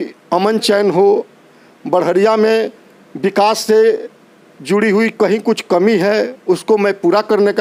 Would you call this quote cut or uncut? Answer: uncut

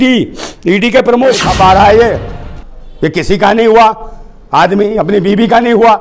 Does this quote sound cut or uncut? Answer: cut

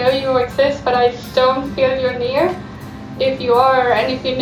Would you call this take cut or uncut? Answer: cut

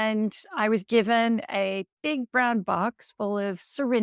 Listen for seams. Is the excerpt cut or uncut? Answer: uncut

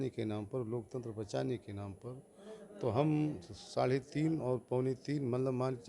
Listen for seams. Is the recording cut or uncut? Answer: uncut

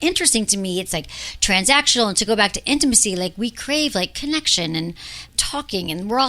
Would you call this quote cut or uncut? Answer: uncut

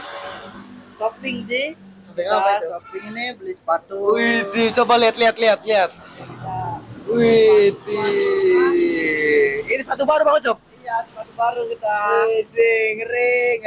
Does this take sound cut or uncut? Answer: uncut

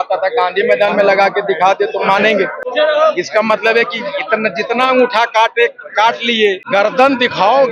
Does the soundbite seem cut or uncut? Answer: cut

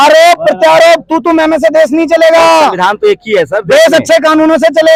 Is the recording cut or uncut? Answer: uncut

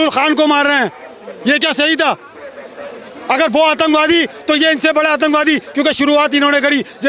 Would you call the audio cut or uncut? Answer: uncut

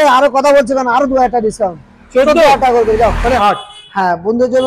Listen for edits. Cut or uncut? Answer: cut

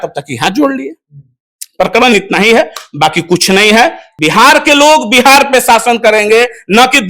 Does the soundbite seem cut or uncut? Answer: cut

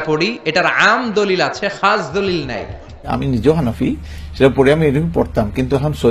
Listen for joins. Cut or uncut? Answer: cut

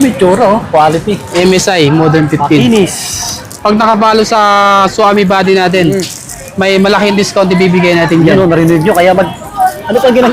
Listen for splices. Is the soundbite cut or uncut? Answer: cut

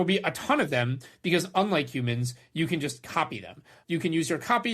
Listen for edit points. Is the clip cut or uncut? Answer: cut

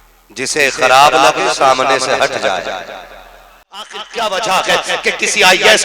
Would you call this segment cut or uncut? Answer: cut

